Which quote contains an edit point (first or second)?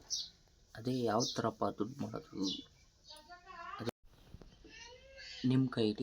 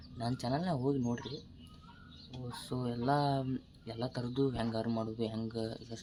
first